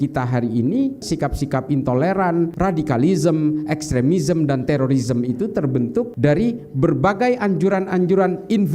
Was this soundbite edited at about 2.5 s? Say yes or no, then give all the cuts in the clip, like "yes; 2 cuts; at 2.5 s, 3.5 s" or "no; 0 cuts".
yes; 3 cuts; at 1.0 s, 2.5 s, 6.1 s